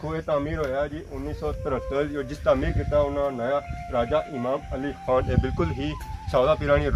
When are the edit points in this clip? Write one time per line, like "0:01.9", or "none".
none